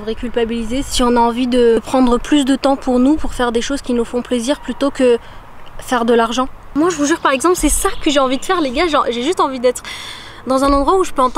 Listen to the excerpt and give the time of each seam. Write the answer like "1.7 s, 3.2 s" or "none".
0.9 s, 1.8 s, 6.6 s